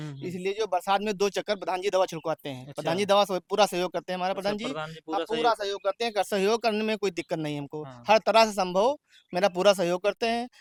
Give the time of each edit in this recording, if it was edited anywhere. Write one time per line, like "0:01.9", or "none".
none